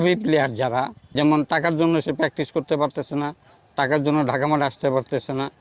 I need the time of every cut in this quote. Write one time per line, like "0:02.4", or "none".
0:01.0